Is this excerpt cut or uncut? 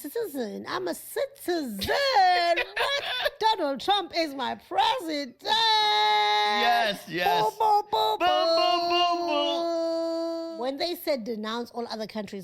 cut